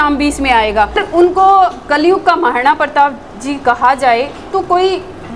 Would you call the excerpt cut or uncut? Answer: cut